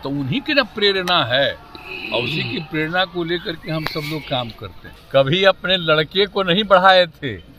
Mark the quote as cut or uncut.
cut